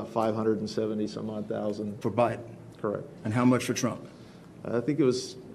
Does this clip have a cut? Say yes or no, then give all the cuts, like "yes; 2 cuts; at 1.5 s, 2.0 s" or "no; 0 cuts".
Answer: yes; 1 cut; at 1.9 s